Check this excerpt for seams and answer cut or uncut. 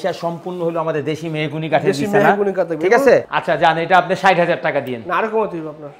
cut